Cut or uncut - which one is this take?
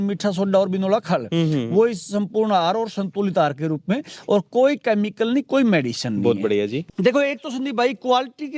cut